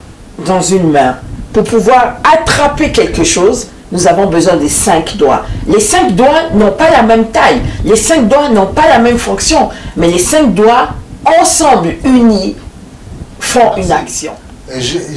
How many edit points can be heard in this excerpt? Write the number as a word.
one